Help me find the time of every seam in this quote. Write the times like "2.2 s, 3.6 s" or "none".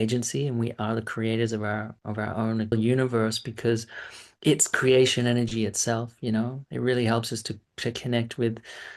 2.7 s